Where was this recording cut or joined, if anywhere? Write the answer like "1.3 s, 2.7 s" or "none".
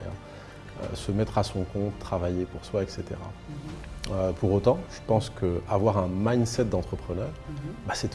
none